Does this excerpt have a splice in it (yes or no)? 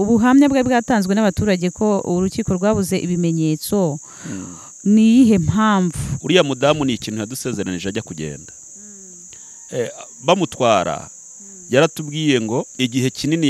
yes